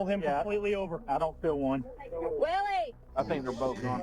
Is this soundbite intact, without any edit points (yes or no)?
no